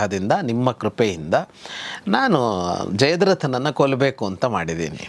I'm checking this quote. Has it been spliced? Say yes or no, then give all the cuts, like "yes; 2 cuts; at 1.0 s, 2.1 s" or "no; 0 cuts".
no; 0 cuts